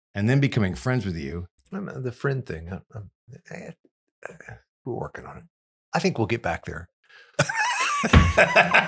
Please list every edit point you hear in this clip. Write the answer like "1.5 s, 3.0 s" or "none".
none